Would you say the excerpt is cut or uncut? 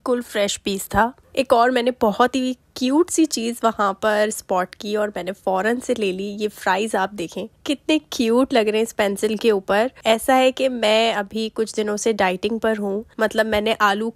uncut